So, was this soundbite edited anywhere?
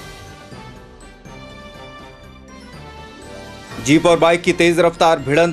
no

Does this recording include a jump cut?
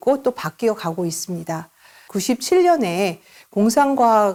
no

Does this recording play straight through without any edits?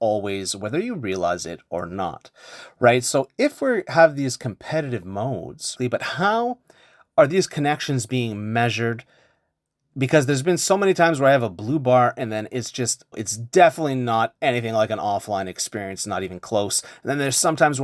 no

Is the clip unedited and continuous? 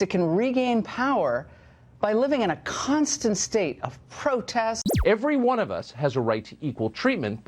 no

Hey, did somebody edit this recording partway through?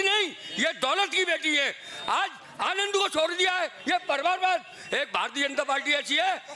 no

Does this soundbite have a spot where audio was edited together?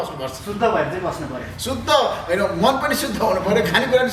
no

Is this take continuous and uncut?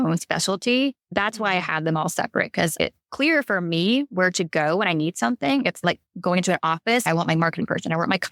no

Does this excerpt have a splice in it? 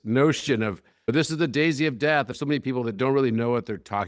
yes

